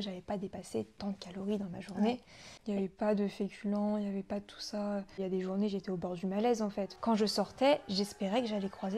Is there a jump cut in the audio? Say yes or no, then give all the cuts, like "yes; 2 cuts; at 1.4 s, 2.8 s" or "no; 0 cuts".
yes; 3 cuts; at 2.5 s, 5.1 s, 6.9 s